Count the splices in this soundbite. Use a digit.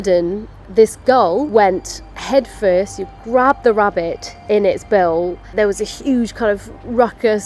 2